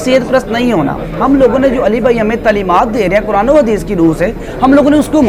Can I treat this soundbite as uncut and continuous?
yes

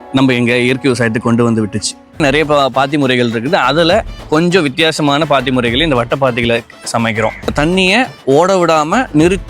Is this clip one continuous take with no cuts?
no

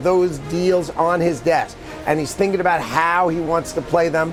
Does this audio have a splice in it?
no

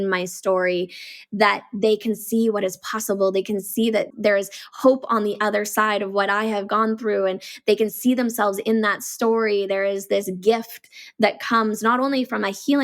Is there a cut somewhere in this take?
yes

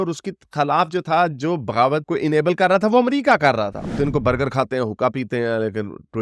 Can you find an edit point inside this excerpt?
yes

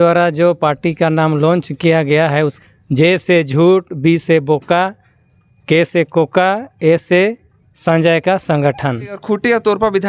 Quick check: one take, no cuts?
no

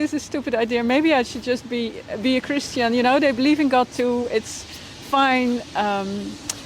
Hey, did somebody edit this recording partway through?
no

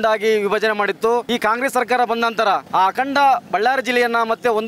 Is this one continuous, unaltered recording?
no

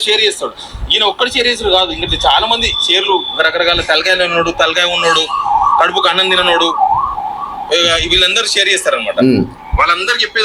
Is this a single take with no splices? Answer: yes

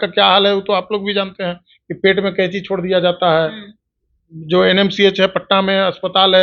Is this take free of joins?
yes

